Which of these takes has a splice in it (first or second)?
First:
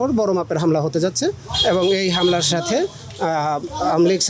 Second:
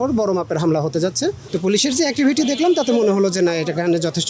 second